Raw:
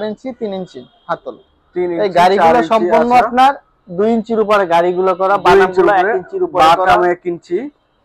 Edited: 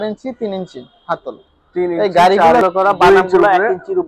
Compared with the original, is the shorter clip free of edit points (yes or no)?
no